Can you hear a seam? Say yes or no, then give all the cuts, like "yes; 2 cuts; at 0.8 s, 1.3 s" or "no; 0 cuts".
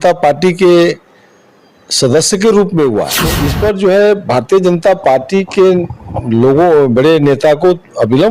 yes; 1 cut; at 3.5 s